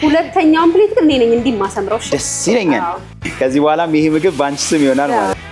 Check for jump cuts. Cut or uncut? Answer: cut